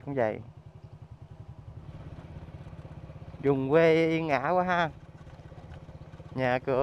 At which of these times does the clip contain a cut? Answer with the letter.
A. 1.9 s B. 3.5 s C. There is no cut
A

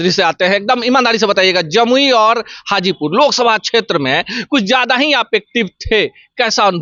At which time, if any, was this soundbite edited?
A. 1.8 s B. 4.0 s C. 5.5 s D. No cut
D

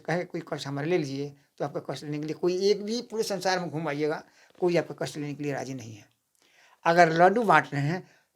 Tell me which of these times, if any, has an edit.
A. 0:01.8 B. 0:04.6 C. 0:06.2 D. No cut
D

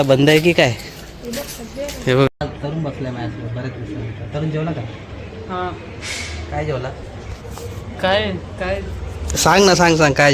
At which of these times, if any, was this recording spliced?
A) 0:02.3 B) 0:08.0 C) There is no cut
A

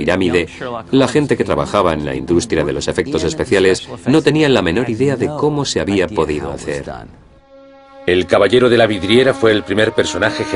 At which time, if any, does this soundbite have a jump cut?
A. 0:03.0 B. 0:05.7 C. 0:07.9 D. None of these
A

